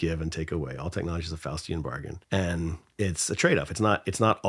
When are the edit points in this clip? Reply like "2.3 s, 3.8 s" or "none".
2.1 s